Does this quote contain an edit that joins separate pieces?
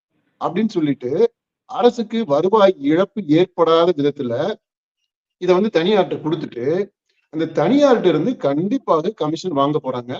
no; 0 cuts

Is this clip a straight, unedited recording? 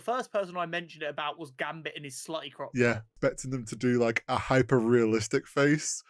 no; 1 cut; at 3.1 s

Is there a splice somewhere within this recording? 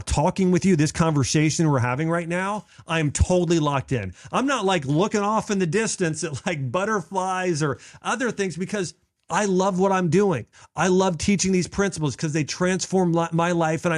no; 0 cuts

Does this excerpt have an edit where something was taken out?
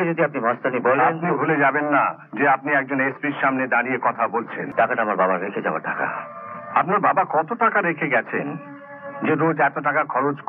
yes; 1 cut; at 4.6 s

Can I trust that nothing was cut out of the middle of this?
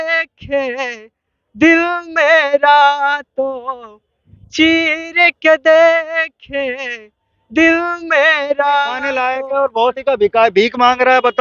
no; 2 cuts; at 9.0 s, 10.0 s

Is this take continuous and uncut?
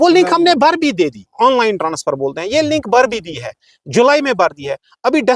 no; 1 cut; at 1.3 s

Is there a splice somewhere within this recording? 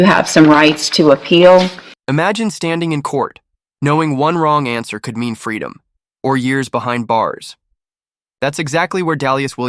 yes; 1 cut; at 2.1 s

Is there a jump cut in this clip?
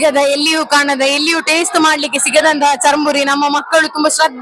no; 0 cuts

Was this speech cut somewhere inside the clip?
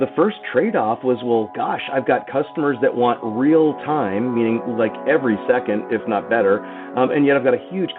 no; 0 cuts

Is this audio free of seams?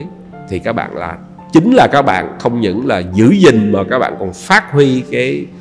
yes; 0 cuts

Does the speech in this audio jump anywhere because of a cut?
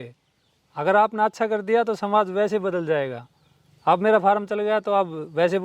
no; 0 cuts

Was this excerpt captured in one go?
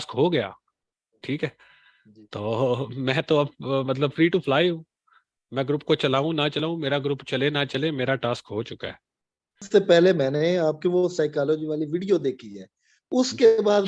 no; 1 cut; at 9.6 s

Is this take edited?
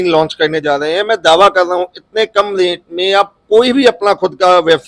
no; 0 cuts

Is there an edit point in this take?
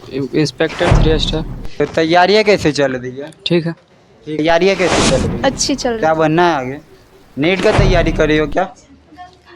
yes; 1 cut; at 4.4 s

